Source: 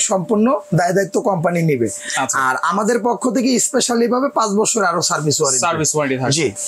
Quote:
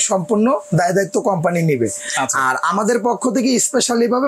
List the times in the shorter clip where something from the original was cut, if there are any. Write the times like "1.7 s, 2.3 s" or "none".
none